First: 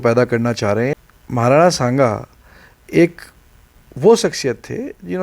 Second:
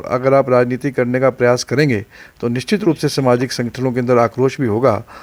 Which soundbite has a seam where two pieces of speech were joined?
first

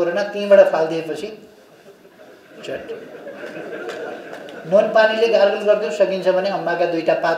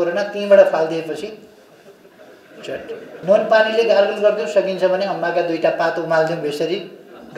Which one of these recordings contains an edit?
second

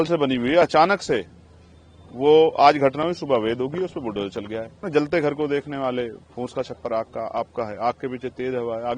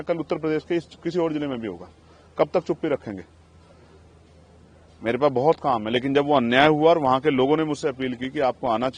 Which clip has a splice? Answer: first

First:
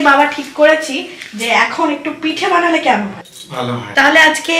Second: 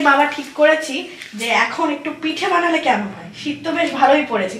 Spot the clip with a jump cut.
first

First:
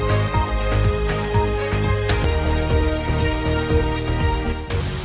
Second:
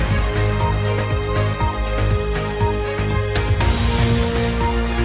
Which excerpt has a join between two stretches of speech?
second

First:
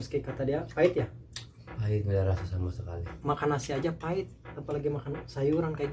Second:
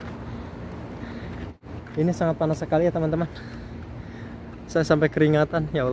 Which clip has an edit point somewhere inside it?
second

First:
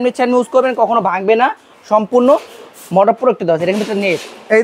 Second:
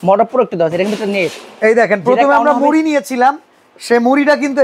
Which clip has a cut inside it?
first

